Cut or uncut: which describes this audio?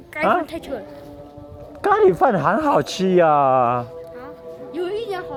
uncut